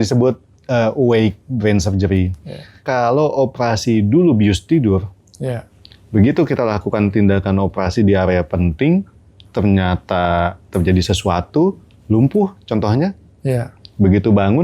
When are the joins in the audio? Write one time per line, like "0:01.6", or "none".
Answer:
0:02.8